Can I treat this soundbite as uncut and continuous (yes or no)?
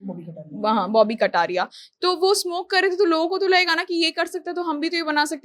yes